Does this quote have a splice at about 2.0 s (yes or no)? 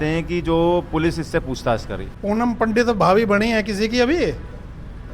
yes